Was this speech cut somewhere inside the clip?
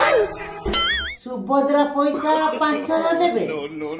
no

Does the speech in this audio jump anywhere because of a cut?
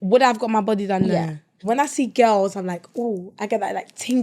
yes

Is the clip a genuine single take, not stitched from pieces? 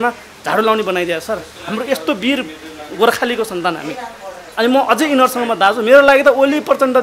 yes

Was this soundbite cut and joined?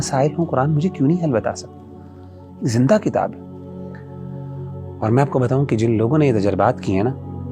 no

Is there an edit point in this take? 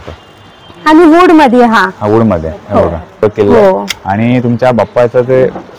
yes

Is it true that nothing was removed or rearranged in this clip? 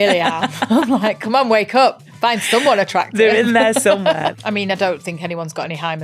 no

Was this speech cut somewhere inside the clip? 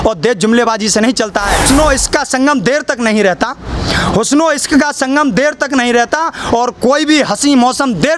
yes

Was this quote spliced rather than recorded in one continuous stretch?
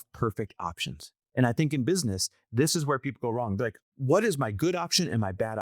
yes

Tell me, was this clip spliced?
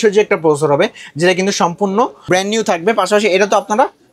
no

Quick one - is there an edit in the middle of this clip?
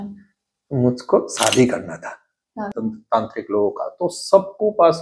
yes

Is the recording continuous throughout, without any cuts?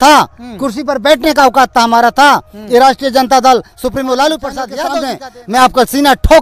no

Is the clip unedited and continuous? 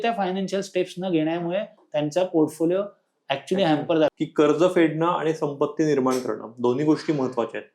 no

